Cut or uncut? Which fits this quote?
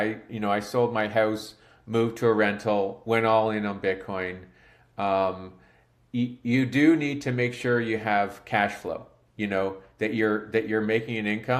uncut